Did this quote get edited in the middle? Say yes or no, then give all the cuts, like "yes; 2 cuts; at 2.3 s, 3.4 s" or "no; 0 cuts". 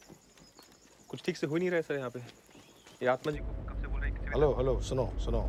no; 0 cuts